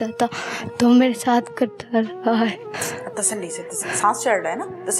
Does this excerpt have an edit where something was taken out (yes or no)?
yes